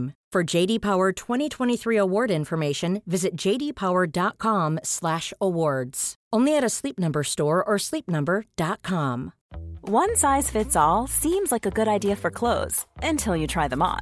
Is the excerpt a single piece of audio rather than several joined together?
no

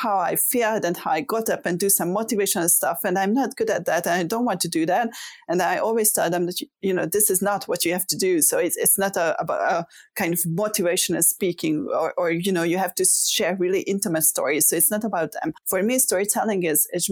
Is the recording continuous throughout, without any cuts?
no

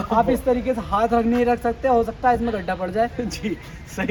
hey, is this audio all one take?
yes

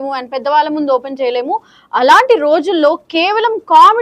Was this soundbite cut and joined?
no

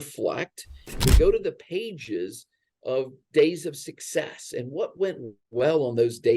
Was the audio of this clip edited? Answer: yes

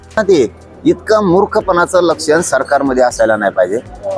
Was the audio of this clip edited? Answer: no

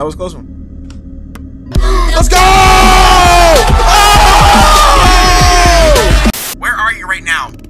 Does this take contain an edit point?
yes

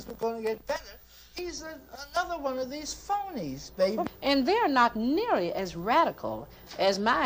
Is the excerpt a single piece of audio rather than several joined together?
no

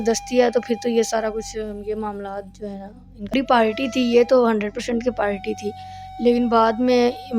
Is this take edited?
yes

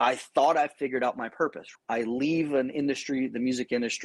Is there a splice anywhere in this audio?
yes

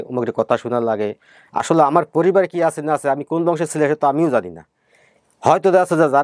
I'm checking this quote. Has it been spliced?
no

